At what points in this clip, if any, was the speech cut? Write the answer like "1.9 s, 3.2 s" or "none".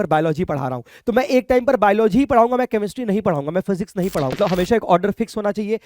4.3 s